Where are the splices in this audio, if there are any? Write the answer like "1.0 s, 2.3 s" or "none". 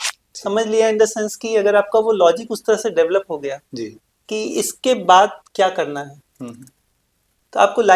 none